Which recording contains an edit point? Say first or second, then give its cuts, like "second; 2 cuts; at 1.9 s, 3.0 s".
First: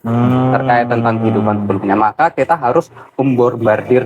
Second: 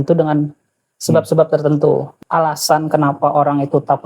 second; 1 cut; at 2.1 s